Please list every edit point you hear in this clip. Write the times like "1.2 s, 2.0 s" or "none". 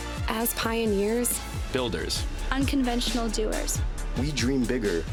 none